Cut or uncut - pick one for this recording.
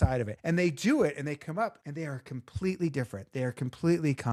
uncut